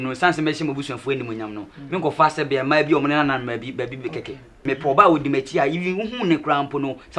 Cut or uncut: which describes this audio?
cut